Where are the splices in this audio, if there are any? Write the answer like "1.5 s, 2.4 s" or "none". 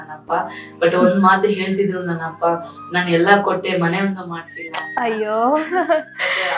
none